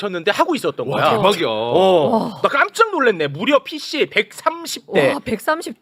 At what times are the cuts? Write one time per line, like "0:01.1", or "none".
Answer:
none

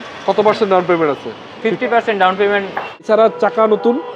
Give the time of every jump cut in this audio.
0:03.0

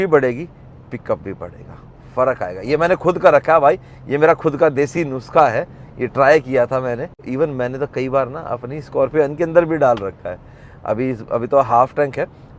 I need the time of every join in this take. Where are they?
none

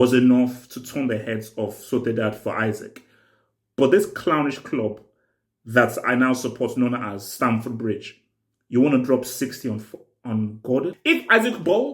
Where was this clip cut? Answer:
0:11.0

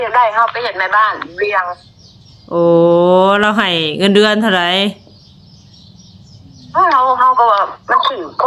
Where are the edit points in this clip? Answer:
none

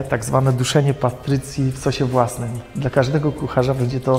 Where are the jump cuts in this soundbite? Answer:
none

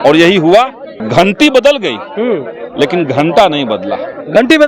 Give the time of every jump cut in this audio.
0:00.9

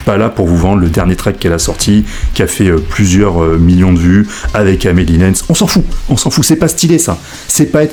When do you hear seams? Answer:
none

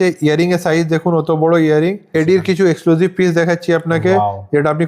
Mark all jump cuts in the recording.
0:02.2

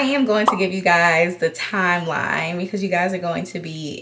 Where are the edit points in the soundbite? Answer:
none

